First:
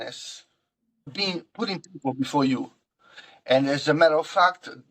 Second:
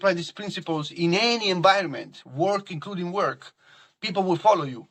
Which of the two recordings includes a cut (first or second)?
first